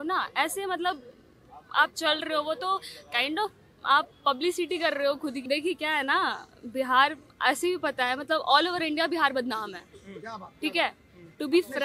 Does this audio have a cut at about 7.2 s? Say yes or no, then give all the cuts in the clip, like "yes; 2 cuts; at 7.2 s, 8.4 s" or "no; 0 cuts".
no; 1 cut; at 5.4 s